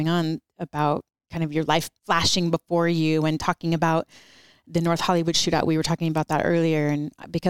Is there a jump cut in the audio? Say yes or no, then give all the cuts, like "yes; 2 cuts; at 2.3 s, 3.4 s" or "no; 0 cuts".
yes; 2 cuts; at 1.2 s, 1.9 s